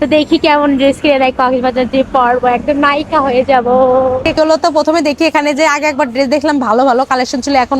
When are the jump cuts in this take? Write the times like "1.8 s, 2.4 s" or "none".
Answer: 4.4 s